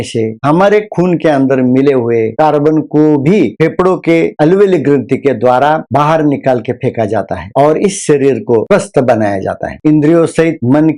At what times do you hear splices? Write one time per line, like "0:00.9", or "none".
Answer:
0:08.6

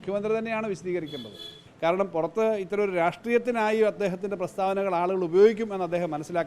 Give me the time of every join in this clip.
0:01.6

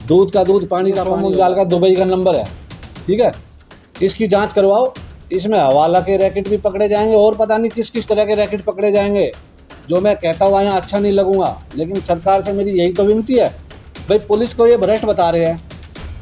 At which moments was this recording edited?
0:01.1

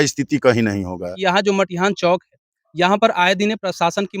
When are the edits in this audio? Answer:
0:01.1

